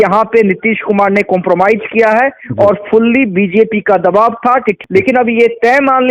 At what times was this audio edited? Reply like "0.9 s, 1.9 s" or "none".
4.8 s